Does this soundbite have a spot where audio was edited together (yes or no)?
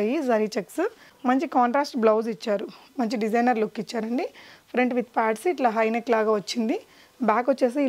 yes